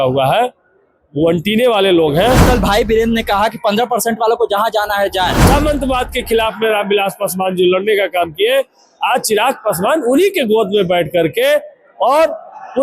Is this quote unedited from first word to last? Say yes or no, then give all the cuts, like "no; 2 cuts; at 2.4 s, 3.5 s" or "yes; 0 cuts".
no; 2 cuts; at 2.4 s, 5.4 s